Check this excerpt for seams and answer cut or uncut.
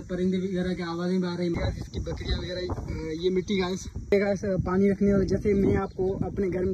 cut